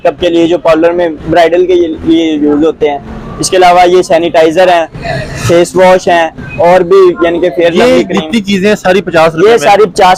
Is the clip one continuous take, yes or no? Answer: yes